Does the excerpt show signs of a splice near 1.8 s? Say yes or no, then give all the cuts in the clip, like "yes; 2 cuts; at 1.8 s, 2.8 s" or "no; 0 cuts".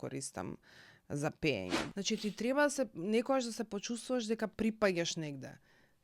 yes; 1 cut; at 1.8 s